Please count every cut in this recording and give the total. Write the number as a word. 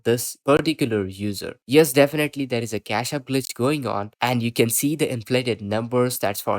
one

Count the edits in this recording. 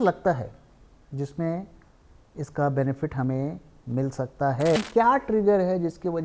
one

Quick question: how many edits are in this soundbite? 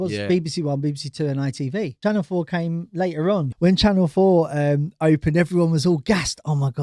two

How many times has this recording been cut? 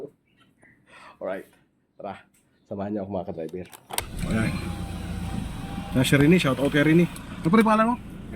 one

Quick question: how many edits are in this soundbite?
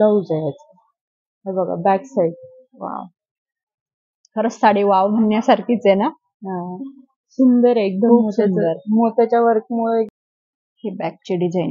one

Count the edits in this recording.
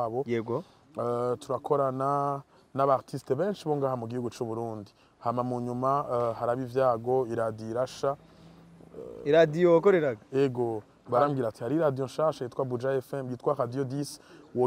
one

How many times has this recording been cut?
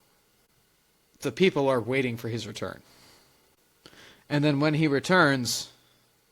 zero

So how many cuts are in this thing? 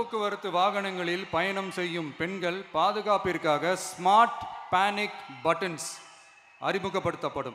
zero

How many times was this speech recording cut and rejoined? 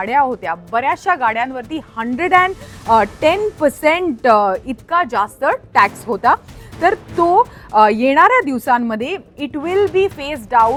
zero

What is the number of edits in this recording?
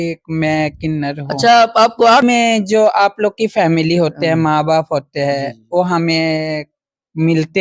one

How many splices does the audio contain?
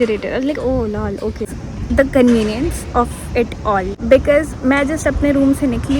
two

